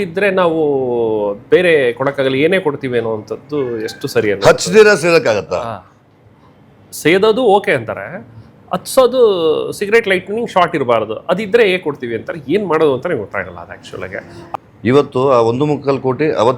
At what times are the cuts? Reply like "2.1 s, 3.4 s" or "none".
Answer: 14.4 s